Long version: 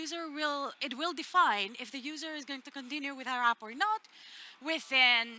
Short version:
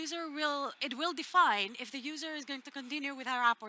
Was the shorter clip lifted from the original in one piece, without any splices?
yes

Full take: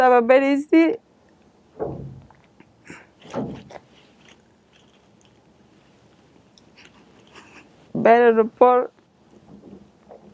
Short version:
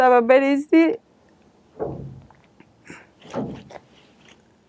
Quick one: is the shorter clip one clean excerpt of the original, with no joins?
yes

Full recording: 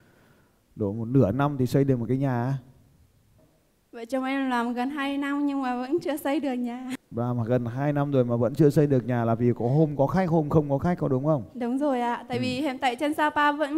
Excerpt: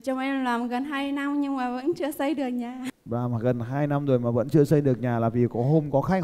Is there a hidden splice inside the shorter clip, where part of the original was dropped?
no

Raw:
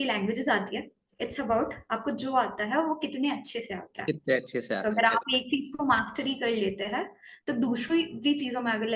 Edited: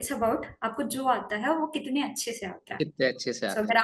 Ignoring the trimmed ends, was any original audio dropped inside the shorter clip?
no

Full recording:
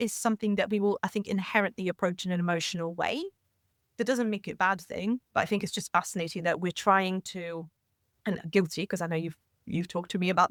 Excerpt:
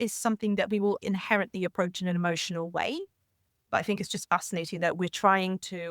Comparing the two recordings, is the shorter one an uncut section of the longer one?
no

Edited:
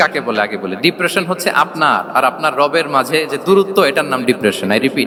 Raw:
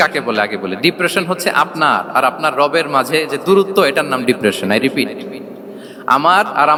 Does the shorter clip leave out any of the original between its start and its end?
no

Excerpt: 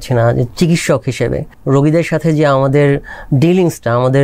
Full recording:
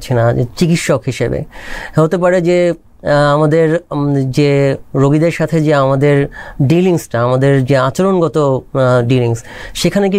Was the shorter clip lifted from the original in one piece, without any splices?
no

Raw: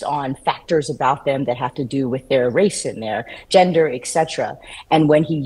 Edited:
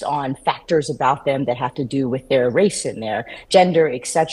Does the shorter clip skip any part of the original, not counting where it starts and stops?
no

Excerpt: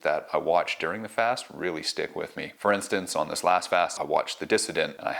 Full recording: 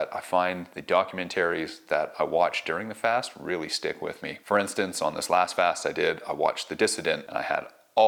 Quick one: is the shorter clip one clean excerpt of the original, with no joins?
no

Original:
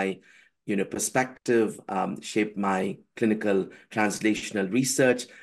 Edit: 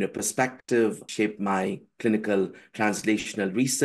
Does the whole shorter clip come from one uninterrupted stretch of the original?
no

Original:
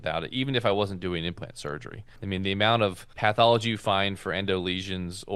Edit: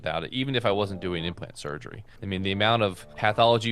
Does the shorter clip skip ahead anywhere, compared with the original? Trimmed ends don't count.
no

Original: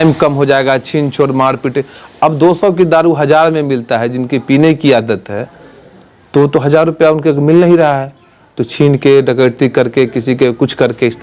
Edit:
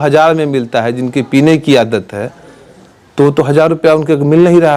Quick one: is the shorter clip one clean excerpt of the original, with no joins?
yes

